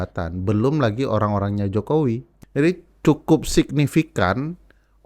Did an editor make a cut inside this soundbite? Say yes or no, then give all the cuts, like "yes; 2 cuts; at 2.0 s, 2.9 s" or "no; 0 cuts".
yes; 1 cut; at 2.3 s